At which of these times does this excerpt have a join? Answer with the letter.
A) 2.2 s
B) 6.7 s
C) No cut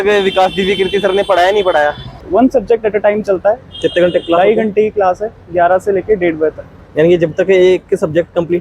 A